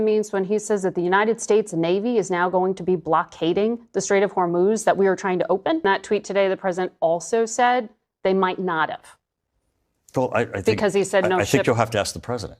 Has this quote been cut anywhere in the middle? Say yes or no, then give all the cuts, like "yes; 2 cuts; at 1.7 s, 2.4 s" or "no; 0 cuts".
yes; 1 cut; at 5.8 s